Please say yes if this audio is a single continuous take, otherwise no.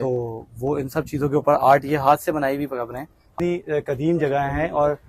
no